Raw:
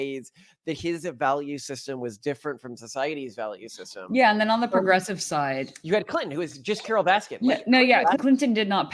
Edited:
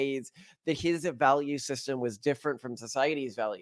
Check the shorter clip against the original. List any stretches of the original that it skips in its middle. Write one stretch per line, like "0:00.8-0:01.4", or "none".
none